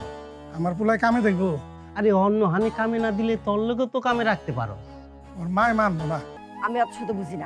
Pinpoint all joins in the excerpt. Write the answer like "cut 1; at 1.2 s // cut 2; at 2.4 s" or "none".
cut 1; at 6.4 s